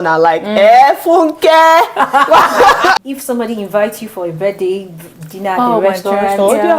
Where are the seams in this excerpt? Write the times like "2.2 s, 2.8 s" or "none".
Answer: 3.0 s